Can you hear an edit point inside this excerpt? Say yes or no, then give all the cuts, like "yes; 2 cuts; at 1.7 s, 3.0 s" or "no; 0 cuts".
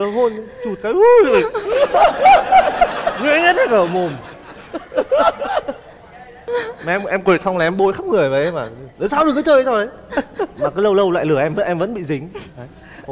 no; 0 cuts